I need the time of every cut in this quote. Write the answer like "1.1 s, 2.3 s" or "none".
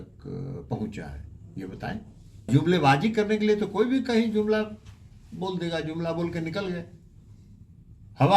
2.5 s